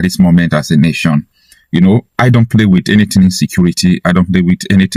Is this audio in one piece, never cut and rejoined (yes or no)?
yes